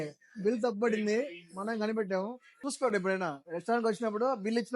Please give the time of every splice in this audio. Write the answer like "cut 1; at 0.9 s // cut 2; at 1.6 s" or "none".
cut 1; at 2.5 s